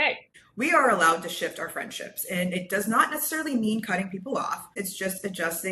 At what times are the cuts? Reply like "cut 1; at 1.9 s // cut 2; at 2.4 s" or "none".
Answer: cut 1; at 4.8 s